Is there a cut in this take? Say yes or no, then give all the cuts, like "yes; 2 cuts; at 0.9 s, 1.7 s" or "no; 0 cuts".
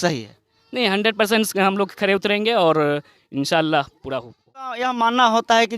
yes; 1 cut; at 4.8 s